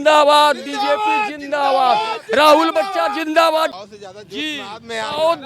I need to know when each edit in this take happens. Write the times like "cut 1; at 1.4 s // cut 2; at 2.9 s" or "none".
cut 1; at 3.8 s